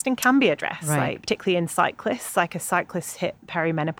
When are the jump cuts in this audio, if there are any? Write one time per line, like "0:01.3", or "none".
0:01.2